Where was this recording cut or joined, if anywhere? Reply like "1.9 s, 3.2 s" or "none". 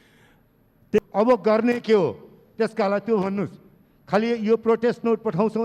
1.0 s